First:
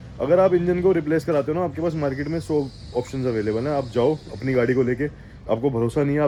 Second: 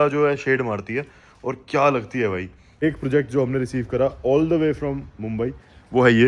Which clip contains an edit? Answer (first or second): second